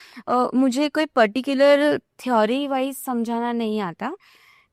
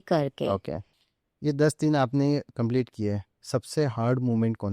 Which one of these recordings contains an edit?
second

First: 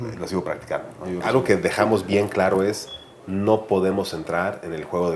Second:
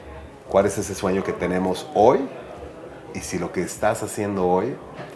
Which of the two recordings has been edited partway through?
first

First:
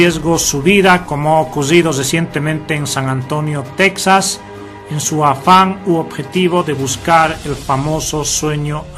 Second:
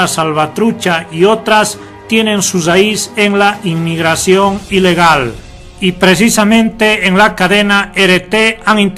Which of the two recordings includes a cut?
first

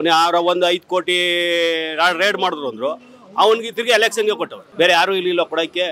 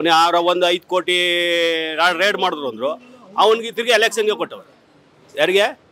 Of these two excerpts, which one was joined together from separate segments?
first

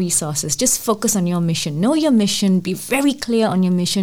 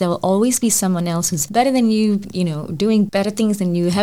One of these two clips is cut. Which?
second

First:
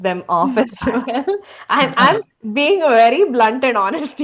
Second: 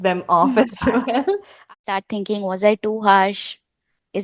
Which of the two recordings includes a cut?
second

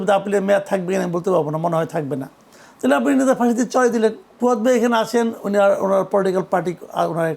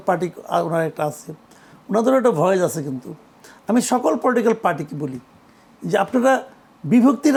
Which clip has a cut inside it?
first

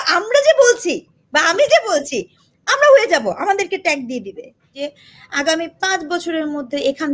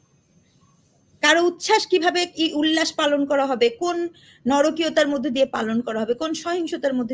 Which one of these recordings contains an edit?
first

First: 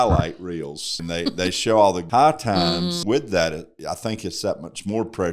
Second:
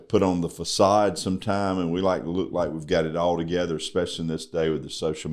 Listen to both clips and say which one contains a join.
first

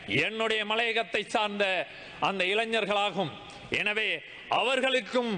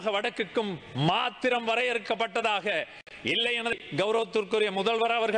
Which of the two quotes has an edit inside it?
second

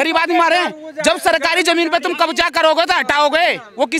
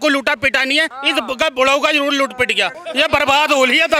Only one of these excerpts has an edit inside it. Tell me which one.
second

